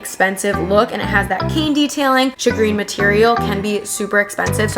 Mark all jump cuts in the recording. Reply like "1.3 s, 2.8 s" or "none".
2.4 s